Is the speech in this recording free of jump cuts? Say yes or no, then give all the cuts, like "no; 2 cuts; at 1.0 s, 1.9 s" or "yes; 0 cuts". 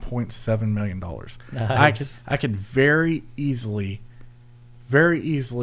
yes; 0 cuts